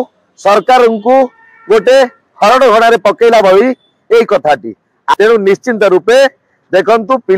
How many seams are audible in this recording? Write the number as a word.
one